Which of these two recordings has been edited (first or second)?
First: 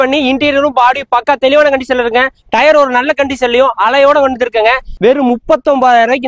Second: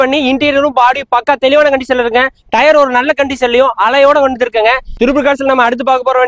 first